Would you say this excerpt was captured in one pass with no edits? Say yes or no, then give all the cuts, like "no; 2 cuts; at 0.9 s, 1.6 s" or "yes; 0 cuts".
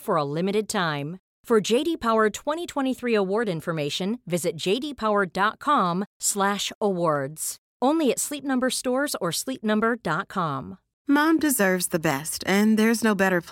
no; 1 cut; at 10.9 s